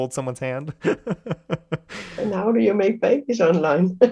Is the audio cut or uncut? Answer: cut